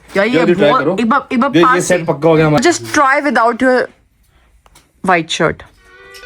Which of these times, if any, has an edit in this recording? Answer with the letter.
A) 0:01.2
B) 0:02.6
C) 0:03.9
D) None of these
B